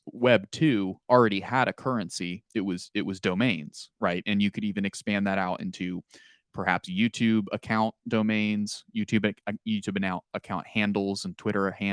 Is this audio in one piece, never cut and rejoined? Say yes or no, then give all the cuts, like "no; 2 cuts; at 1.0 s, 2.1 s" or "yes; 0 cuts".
yes; 0 cuts